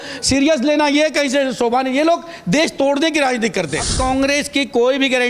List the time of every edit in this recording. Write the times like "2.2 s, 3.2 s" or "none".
3.9 s